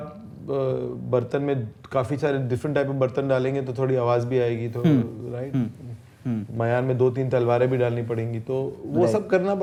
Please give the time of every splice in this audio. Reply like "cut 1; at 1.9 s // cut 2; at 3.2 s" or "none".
none